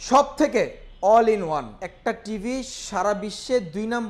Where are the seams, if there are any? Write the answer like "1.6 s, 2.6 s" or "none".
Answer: 1.8 s